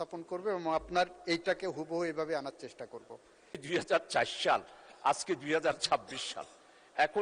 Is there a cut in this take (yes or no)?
yes